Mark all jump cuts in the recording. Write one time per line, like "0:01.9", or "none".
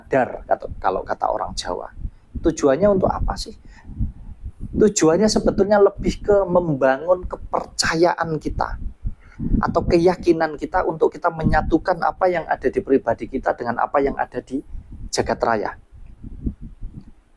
none